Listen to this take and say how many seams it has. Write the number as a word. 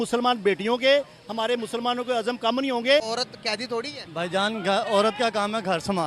one